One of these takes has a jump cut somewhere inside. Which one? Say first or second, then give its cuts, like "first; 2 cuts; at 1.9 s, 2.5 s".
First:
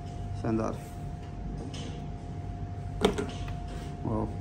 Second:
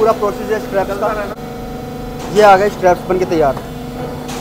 second; 1 cut; at 1.4 s